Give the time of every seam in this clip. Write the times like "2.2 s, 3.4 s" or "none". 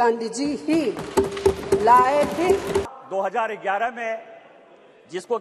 2.9 s

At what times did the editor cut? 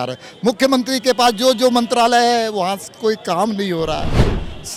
none

